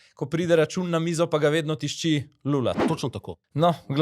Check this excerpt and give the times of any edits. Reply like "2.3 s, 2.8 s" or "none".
2.8 s